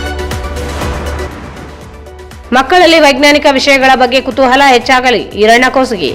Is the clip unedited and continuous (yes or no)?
no